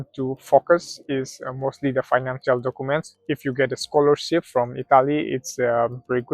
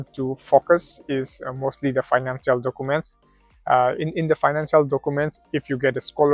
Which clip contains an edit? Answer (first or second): first